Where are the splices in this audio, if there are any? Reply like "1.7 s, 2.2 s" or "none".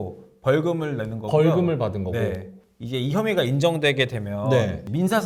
none